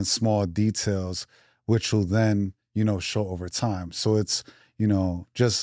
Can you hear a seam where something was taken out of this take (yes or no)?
no